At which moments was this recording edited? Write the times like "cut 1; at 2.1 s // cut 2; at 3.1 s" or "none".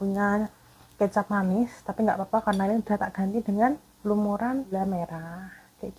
cut 1; at 4.7 s